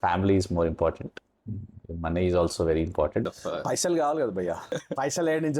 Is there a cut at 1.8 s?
no; 2 cuts; at 3.3 s, 4.7 s

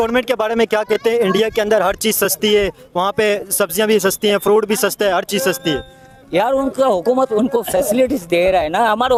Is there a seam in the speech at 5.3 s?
no; 0 cuts

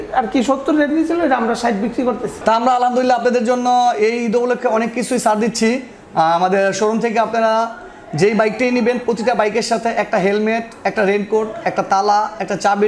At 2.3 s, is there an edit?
yes; 1 cut; at 2.3 s

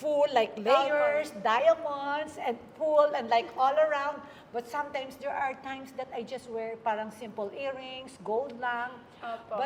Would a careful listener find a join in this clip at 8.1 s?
no; 0 cuts

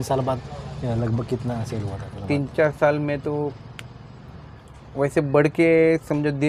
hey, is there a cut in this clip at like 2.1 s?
no; 0 cuts

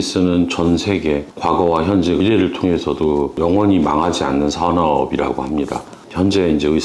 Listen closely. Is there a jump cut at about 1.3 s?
yes; 1 cut; at 1.3 s

